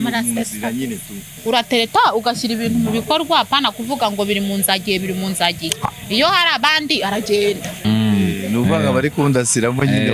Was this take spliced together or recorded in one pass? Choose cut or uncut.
cut